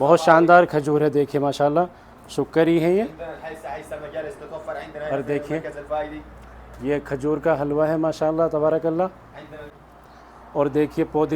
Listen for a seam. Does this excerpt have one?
yes; 1 cut; at 9.7 s

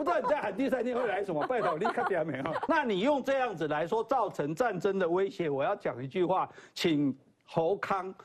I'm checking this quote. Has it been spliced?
yes; 1 cut; at 2.6 s

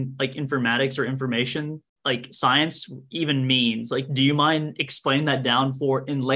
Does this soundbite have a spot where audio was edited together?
no; 0 cuts

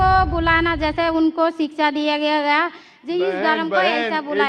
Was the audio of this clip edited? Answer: no; 0 cuts

